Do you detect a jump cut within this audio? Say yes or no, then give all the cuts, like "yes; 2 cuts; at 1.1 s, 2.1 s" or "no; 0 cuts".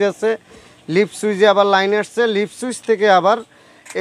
no; 0 cuts